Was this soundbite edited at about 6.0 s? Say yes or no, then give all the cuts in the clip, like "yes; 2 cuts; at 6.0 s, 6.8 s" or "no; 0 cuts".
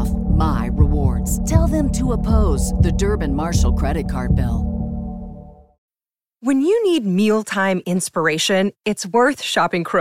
yes; 1 cut; at 6.0 s